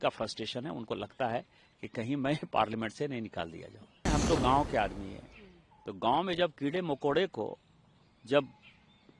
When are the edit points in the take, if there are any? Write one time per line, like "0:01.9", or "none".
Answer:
0:04.1